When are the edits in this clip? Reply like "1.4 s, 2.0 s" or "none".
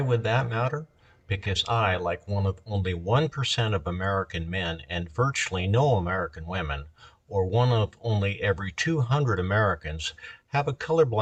none

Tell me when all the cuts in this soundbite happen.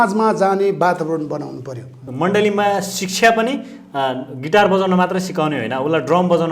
1.9 s

